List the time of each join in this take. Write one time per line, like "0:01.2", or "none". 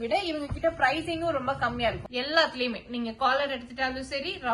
0:02.0